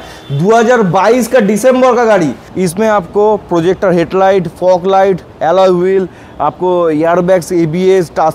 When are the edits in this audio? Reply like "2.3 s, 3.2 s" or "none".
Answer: 2.4 s